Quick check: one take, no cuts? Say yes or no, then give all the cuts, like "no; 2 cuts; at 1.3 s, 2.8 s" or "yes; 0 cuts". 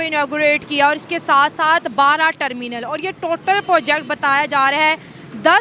yes; 0 cuts